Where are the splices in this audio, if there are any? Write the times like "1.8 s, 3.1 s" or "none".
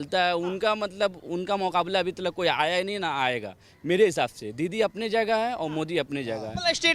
none

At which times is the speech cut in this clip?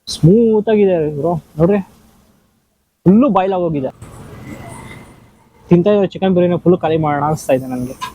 4.0 s

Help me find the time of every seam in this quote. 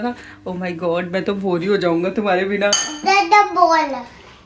2.8 s

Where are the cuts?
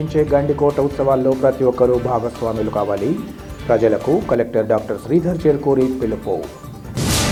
none

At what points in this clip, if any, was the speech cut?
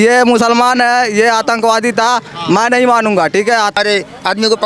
3.7 s

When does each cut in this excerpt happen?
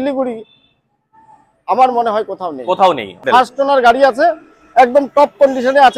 3.2 s

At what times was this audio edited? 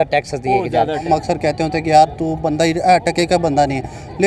1.1 s

